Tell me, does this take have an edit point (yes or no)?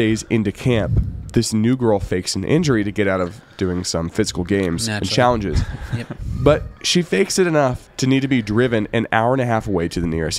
no